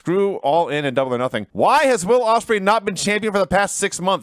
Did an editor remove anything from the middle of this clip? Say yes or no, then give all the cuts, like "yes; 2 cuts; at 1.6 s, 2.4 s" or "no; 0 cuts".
yes; 1 cut; at 1.4 s